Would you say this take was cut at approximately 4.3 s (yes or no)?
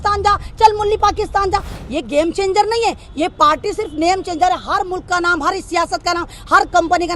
no